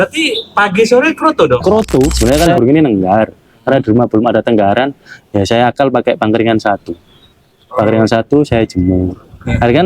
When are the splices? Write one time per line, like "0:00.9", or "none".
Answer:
0:02.1